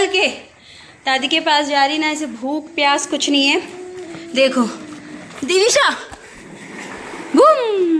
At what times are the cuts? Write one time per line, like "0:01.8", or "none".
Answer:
none